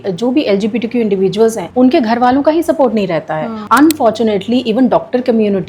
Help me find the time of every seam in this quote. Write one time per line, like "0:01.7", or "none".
0:01.6
0:03.6